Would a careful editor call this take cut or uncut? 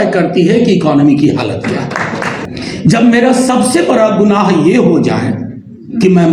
cut